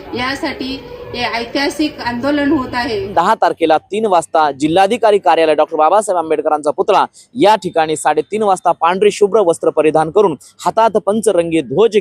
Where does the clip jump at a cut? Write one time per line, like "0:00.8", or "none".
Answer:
0:03.1